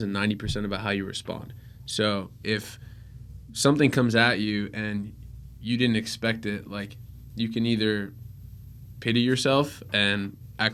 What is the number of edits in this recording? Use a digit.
0